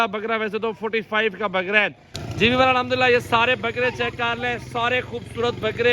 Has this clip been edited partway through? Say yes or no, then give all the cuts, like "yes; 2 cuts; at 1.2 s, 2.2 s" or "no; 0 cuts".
yes; 1 cut; at 2.2 s